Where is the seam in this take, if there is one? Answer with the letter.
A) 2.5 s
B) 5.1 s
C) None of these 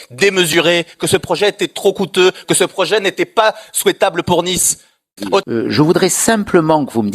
B